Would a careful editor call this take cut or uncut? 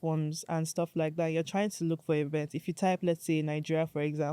uncut